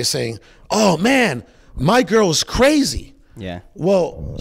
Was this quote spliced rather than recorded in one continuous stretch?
no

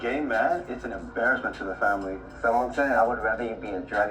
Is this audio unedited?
no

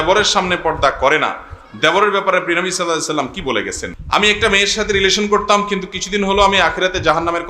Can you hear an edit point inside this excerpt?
yes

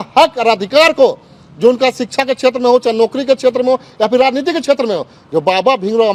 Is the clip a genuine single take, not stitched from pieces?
yes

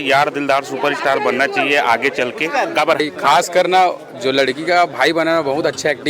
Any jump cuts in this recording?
yes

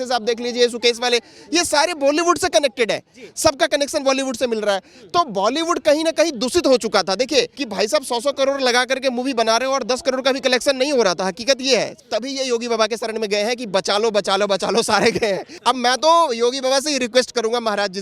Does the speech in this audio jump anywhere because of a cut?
yes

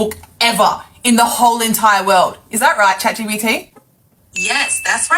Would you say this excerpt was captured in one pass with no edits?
yes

